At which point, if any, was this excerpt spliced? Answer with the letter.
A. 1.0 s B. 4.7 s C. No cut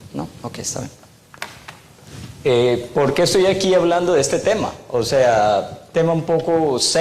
A